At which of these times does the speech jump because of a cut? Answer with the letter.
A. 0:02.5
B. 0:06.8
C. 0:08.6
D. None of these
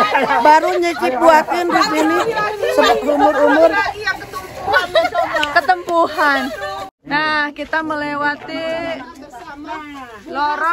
B